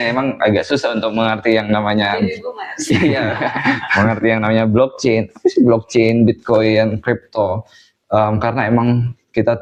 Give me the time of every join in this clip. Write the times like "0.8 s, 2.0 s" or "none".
none